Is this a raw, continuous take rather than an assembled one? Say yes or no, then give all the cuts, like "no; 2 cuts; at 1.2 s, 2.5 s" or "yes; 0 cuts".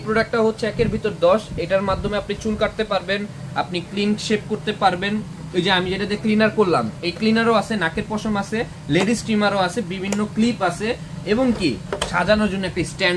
yes; 0 cuts